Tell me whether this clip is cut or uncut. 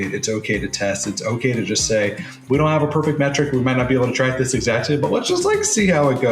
uncut